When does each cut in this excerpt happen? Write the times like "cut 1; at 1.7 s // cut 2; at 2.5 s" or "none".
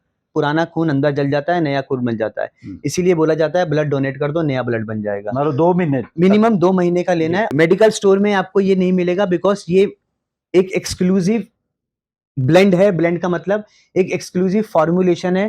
cut 1; at 7.5 s